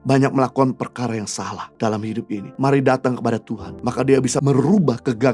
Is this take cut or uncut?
cut